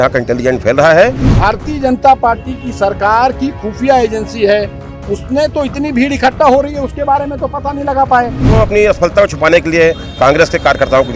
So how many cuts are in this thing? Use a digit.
2